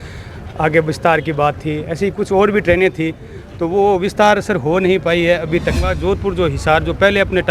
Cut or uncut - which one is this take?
cut